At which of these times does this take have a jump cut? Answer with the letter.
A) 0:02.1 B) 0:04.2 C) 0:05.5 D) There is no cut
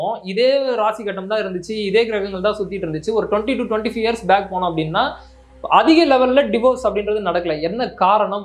D